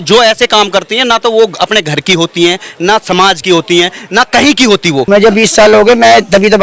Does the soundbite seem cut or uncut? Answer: cut